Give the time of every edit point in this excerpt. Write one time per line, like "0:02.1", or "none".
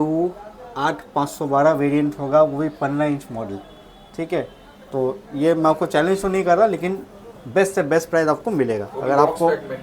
none